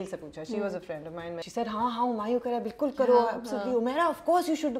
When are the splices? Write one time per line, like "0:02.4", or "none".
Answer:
0:01.4